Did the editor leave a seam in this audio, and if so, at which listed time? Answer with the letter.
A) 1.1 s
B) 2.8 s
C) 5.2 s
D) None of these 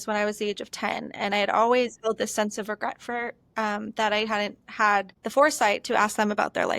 C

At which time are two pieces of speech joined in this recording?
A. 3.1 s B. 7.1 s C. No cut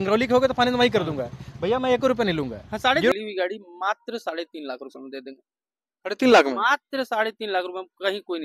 A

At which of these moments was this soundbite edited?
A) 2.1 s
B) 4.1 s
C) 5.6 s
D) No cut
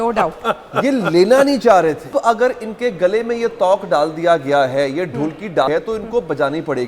A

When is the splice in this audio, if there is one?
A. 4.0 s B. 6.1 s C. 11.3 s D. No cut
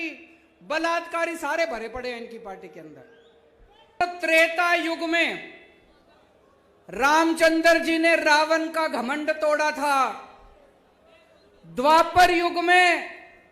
A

